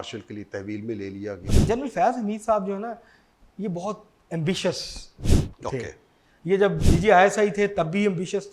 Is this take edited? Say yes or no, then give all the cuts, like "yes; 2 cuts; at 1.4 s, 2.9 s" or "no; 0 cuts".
yes; 1 cut; at 1.4 s